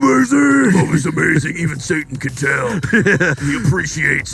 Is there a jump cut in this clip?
yes; 1 cut; at 3.3 s

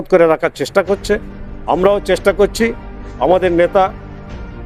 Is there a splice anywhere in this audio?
no; 0 cuts

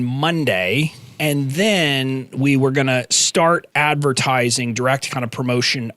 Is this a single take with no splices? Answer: no; 1 cut; at 1.0 s

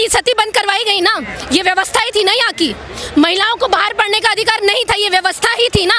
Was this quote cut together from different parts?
no; 0 cuts

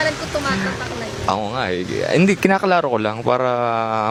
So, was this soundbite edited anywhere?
no; 0 cuts

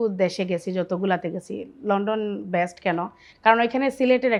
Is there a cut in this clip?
no; 0 cuts

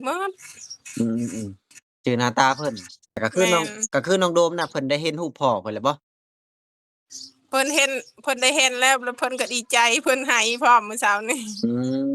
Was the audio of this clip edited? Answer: yes; 1 cut; at 3.2 s

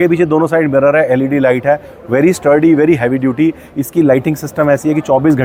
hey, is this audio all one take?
yes; 0 cuts

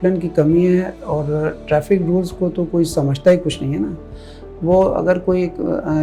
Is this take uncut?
yes; 0 cuts

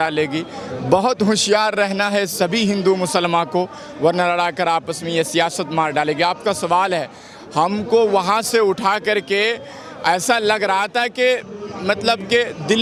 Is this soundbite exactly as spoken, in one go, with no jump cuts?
yes; 0 cuts

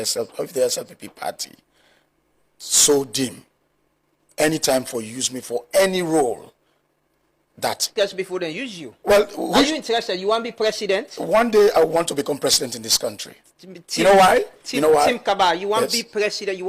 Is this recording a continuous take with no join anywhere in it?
no; 1 cut; at 7.9 s

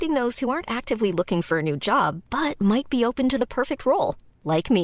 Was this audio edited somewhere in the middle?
no; 0 cuts

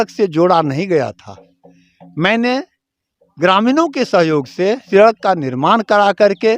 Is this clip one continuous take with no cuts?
no; 1 cut; at 4.8 s

